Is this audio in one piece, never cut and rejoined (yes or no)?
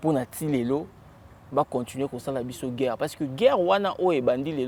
yes